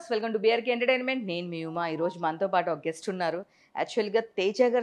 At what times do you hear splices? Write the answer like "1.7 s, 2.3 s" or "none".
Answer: none